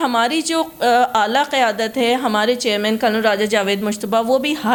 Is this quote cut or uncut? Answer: uncut